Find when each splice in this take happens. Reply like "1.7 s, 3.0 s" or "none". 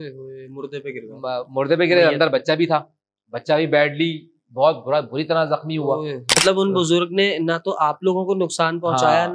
6.4 s